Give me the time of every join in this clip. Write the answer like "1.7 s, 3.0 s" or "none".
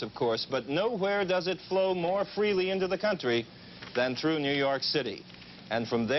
1.0 s